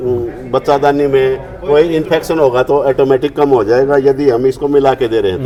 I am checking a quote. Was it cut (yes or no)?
no